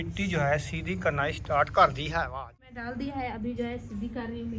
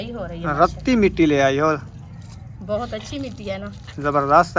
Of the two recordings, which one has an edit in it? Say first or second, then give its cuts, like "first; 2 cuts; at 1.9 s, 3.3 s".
first; 1 cut; at 2.6 s